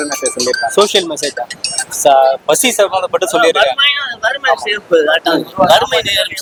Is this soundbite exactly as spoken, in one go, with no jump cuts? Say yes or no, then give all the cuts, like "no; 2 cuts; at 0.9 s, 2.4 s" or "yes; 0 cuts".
yes; 0 cuts